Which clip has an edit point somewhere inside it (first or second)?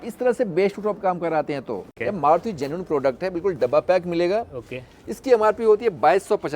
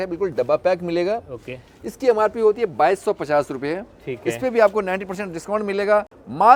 first